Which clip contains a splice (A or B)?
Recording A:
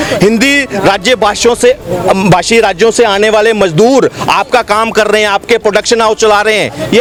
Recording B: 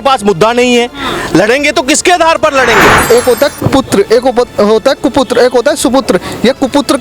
B